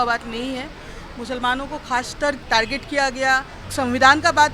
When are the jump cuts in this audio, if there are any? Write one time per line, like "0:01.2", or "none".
0:02.4
0:03.6